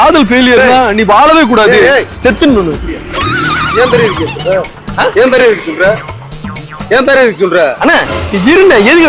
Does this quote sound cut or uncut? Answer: uncut